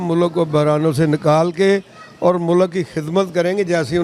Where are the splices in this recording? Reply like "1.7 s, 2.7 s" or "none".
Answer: none